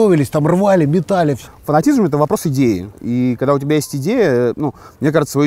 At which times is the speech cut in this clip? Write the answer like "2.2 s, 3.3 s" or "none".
1.4 s, 3.0 s